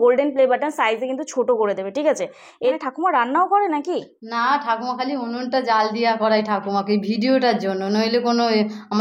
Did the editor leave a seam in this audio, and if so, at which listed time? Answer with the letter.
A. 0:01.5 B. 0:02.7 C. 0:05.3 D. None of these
B